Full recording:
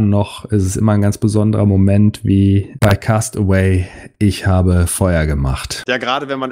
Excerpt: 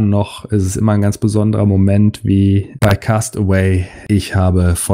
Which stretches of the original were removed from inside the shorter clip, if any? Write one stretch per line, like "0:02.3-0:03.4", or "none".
0:03.9-0:04.0